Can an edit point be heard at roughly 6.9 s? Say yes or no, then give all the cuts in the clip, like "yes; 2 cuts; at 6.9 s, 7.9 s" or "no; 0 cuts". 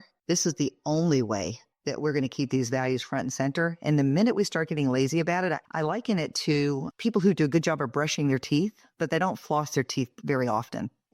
yes; 2 cuts; at 5.7 s, 6.9 s